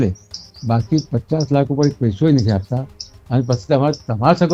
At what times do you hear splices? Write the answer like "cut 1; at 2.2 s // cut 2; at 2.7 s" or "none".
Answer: none